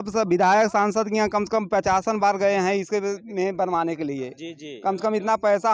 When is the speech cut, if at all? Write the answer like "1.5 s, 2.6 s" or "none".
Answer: none